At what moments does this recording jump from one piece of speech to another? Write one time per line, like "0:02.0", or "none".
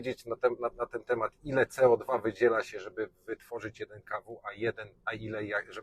none